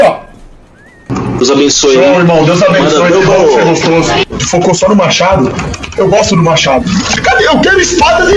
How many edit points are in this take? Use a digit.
1